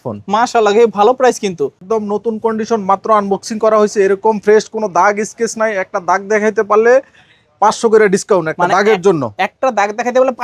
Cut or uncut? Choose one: cut